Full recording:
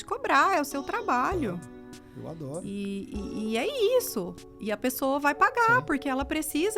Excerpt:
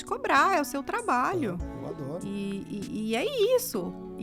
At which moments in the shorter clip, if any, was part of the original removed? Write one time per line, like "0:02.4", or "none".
0:01.7